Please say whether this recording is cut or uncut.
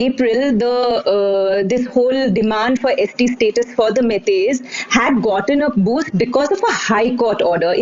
uncut